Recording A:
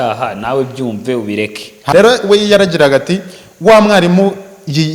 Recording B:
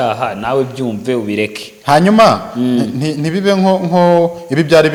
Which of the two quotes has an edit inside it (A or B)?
A